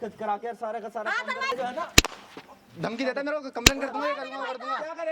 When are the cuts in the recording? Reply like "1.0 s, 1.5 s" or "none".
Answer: 1.5 s